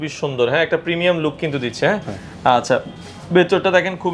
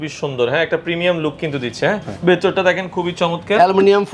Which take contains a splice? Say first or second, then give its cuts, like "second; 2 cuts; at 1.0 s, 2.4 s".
second; 1 cut; at 2.1 s